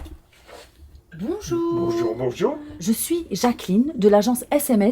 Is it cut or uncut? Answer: cut